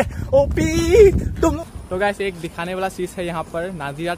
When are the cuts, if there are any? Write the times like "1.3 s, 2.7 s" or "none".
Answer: 1.6 s